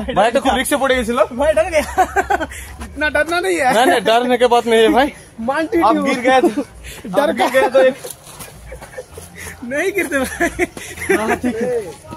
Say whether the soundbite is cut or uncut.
uncut